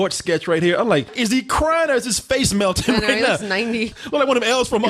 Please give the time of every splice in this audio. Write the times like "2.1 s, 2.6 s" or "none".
1.1 s, 3.9 s